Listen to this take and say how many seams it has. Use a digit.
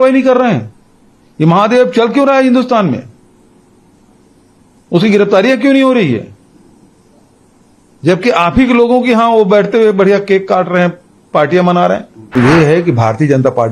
1